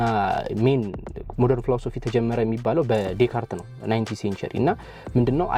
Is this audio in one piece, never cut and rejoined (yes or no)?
yes